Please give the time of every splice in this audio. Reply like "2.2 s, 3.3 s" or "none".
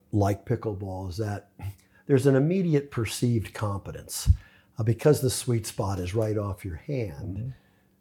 none